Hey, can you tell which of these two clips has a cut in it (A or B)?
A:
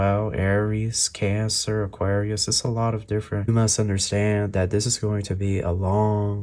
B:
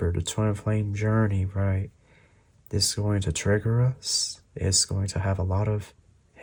A